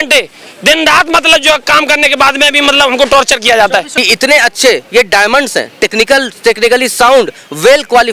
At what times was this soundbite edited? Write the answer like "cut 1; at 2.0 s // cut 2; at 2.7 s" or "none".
cut 1; at 3.9 s